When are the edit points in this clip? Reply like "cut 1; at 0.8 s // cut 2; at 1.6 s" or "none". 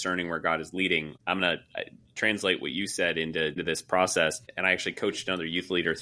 cut 1; at 1.1 s // cut 2; at 3.6 s // cut 3; at 4.5 s